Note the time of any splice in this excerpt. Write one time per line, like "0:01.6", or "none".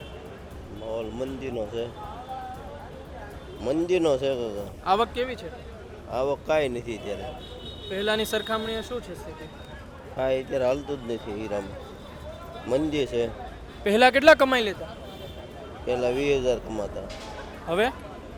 none